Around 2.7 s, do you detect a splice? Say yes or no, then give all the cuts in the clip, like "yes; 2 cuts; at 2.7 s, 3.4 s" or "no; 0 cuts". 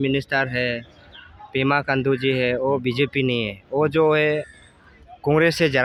no; 0 cuts